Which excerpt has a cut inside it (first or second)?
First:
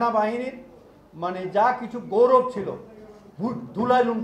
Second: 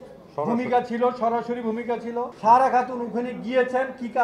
second